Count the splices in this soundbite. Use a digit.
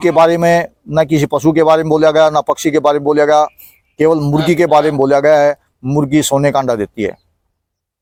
0